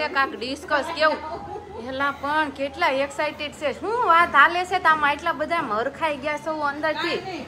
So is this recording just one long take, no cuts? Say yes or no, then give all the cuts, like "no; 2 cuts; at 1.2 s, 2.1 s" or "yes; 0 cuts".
yes; 0 cuts